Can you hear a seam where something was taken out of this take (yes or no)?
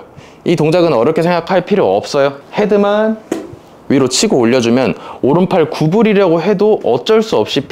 no